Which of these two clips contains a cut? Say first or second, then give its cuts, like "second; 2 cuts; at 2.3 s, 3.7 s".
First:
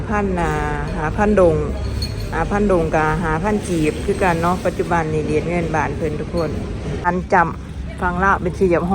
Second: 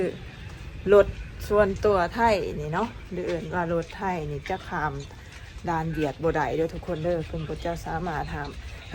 first; 1 cut; at 7.1 s